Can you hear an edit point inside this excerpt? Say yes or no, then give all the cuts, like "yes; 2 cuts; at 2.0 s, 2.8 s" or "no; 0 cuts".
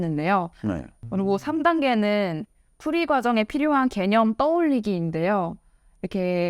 yes; 1 cut; at 0.9 s